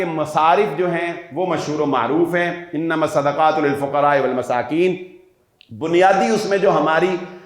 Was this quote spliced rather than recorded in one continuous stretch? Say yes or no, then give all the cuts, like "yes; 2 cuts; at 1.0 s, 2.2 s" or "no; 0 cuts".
no; 0 cuts